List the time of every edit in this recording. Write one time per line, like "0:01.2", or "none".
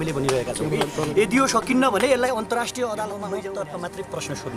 0:03.2